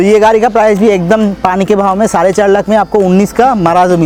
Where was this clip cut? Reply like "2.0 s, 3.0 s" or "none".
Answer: none